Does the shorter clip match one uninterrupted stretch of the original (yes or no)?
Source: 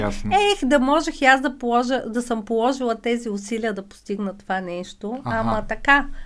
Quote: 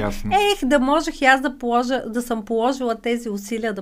yes